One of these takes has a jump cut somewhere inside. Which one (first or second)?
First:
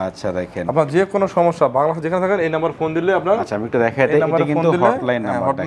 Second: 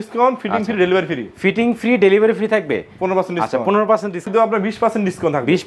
second